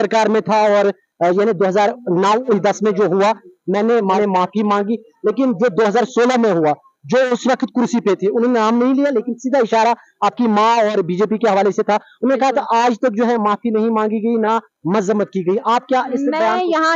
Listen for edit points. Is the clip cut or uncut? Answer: uncut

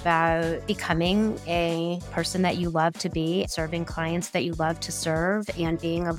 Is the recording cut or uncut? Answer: cut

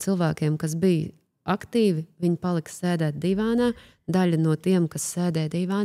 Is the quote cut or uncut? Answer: uncut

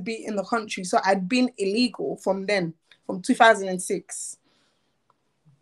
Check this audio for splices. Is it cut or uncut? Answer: uncut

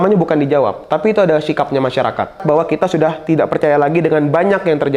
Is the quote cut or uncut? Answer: cut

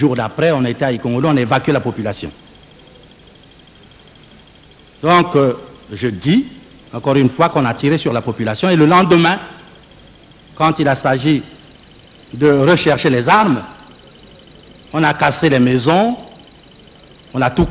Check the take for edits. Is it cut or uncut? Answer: uncut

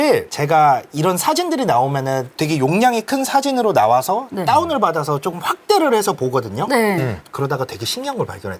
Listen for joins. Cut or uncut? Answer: uncut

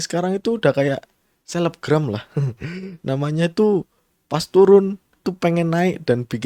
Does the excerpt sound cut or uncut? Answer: uncut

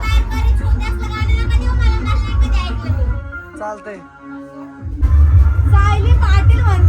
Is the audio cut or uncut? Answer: cut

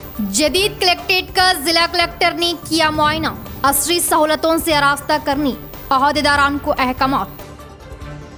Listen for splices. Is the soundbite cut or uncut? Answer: uncut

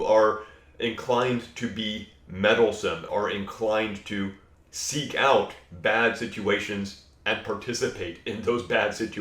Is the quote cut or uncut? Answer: cut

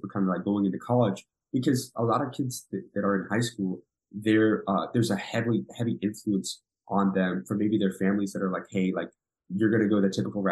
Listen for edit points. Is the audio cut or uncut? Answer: uncut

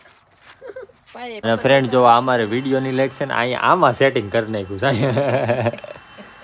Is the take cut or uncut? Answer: cut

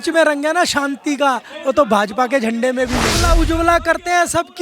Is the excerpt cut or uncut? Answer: cut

